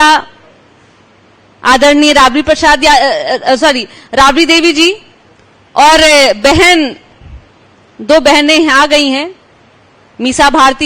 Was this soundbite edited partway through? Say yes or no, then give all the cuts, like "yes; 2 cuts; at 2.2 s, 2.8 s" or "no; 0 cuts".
no; 0 cuts